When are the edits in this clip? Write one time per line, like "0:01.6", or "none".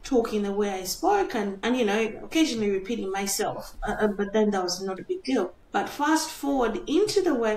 0:01.6
0:05.6